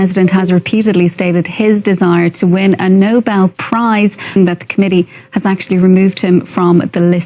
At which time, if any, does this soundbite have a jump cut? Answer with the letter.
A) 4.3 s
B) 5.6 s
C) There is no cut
A